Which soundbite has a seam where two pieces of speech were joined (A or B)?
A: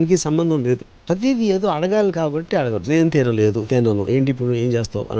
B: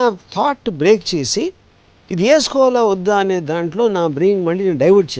A